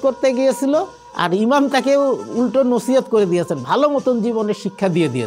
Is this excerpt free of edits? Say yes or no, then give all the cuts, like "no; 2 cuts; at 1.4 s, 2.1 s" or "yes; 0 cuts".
yes; 0 cuts